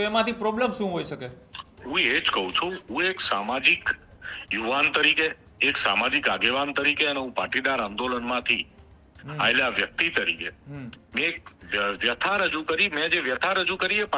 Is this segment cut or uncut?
uncut